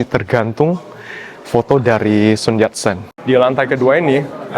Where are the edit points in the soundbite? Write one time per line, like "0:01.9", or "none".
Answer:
0:03.1